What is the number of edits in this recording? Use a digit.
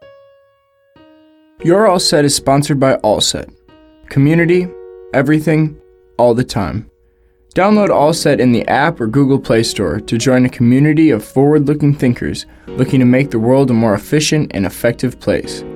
1